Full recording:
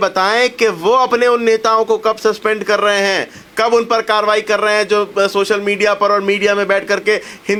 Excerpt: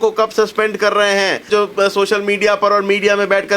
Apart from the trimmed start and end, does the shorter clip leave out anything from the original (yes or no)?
yes